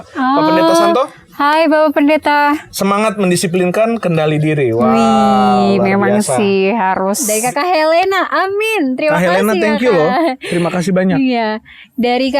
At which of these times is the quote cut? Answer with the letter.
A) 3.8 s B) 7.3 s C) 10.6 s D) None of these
B